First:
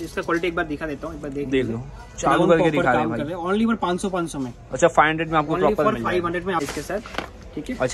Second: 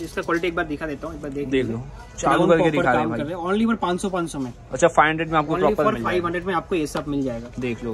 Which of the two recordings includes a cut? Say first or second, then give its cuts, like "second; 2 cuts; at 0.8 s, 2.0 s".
first; 1 cut; at 6.6 s